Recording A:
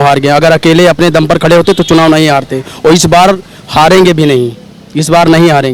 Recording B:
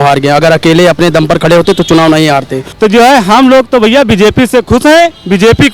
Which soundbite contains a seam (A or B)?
B